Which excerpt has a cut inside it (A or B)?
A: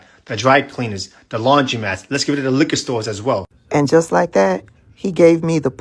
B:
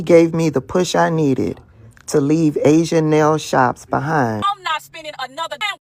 B